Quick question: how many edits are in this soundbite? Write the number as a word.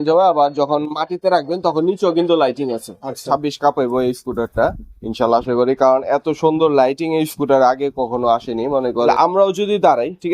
two